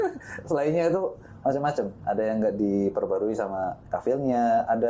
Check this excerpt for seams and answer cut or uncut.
cut